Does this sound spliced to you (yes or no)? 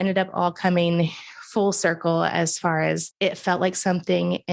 yes